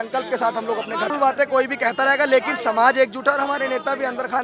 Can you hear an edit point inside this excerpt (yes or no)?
yes